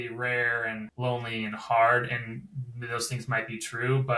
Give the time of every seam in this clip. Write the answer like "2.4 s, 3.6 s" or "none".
0.9 s